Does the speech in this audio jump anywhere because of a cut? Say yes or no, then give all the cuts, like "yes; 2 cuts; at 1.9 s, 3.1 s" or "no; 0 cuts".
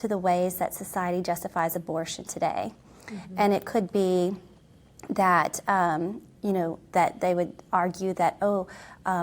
no; 0 cuts